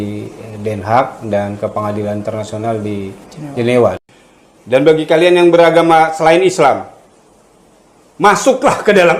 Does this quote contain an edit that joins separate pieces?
yes; 1 cut; at 4.0 s

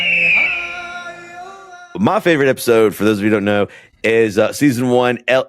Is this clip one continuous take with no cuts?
yes; 0 cuts

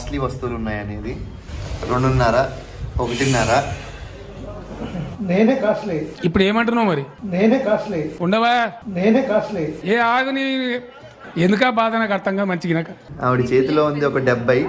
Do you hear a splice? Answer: no; 0 cuts

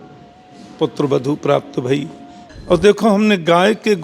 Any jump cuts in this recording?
yes; 1 cut; at 2.5 s

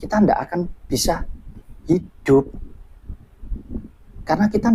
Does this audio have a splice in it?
no; 0 cuts

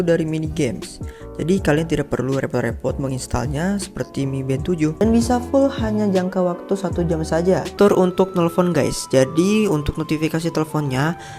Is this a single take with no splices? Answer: no; 2 cuts; at 5.0 s, 7.7 s

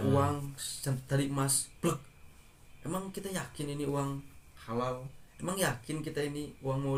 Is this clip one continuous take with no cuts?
yes; 0 cuts

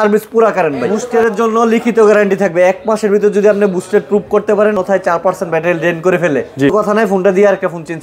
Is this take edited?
yes; 3 cuts; at 1.1 s, 4.7 s, 6.7 s

